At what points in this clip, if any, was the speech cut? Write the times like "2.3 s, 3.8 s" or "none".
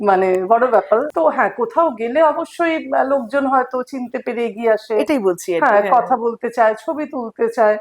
1.1 s